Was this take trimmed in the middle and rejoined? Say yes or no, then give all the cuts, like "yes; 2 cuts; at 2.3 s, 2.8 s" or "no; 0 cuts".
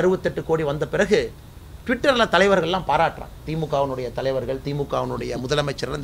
no; 0 cuts